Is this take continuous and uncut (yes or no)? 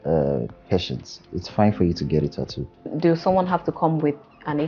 no